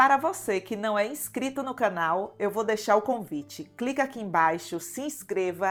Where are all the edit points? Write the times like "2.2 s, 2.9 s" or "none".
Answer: none